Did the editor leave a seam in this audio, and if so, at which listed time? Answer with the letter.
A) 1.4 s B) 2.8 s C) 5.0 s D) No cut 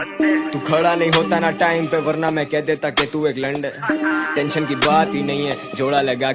D